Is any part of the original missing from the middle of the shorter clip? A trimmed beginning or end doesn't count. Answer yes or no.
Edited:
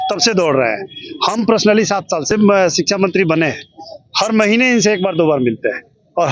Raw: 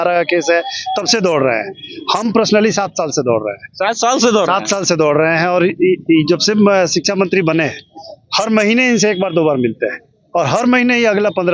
yes